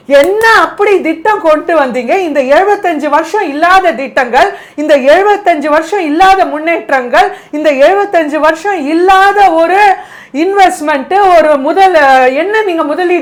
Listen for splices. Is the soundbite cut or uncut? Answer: uncut